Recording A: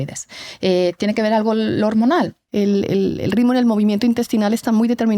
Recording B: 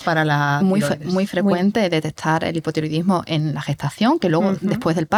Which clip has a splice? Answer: A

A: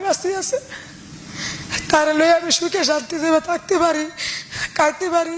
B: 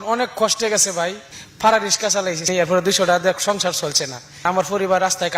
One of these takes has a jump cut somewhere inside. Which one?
B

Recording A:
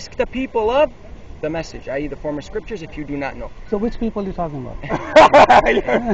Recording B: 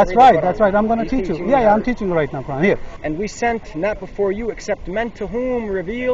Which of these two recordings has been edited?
B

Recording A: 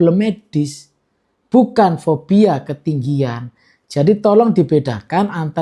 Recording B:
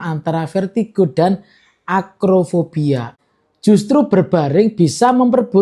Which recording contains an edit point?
B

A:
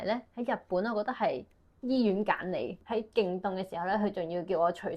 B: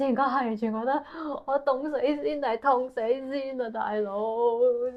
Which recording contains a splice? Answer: A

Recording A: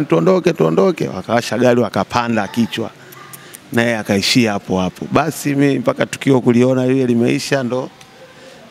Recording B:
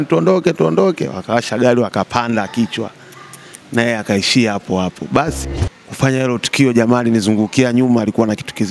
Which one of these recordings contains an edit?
B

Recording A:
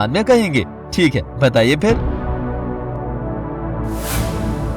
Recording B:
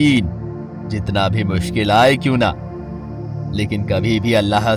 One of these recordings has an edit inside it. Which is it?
A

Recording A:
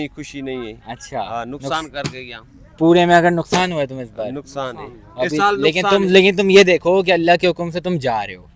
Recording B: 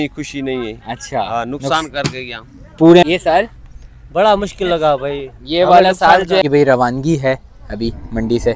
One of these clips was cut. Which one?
B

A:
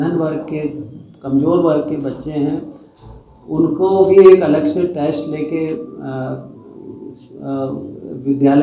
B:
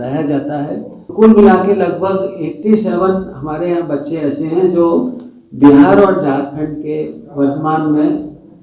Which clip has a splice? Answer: B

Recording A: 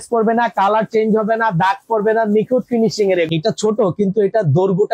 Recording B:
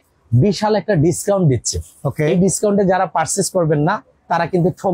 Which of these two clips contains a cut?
A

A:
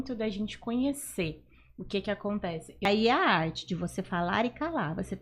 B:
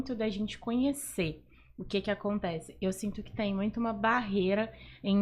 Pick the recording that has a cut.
A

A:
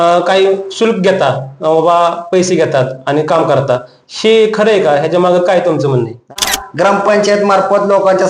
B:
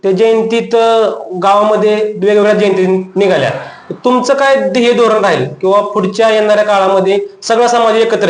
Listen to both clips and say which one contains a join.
A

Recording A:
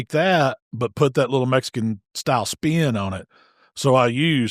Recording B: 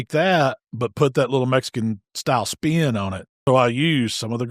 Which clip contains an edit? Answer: B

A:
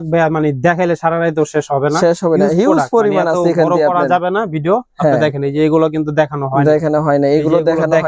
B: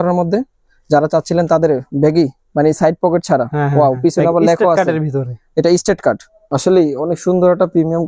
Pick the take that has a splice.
B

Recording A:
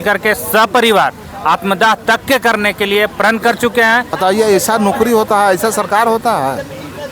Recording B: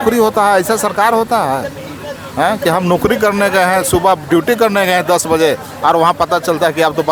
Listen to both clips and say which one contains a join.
A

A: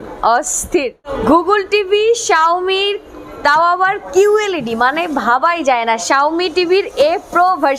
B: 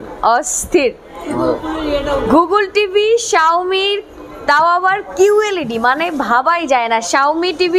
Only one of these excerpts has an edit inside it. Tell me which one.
A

